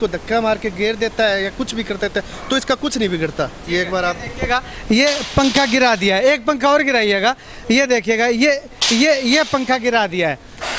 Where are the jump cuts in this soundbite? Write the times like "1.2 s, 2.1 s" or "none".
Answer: none